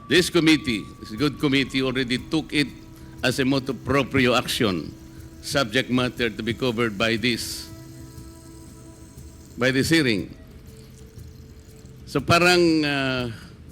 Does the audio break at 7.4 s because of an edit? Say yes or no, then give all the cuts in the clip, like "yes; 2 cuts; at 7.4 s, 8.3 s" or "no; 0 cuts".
yes; 2 cuts; at 7.4 s, 8.9 s